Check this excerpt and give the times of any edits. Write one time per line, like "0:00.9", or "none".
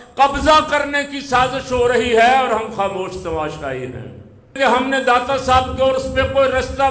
0:04.5